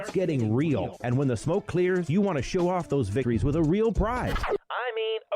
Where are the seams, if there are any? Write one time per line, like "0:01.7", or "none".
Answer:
0:01.0
0:03.2
0:04.4